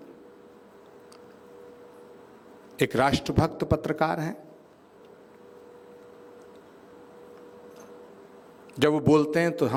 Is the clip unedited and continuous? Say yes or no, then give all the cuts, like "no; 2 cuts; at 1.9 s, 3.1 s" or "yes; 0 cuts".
yes; 0 cuts